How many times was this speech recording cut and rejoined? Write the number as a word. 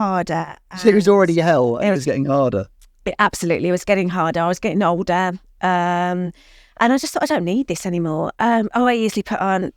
one